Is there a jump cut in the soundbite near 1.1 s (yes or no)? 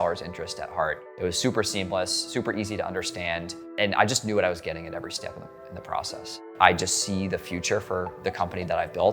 yes